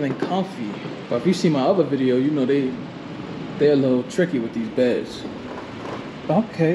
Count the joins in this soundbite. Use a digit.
0